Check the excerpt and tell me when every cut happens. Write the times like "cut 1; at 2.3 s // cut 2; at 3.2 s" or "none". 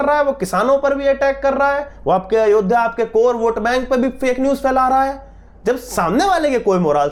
none